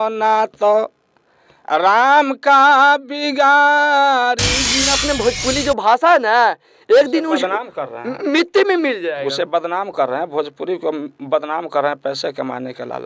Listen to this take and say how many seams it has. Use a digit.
1